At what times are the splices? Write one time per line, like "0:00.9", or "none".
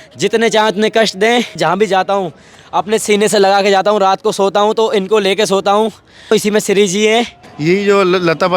0:01.6
0:06.3
0:07.4